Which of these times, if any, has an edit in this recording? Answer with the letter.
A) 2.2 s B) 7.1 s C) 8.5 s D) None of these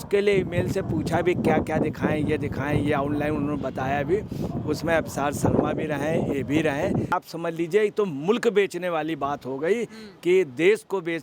B